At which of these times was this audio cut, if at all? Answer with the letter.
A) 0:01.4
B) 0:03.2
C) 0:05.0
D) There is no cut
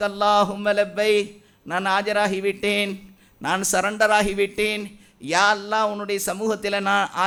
D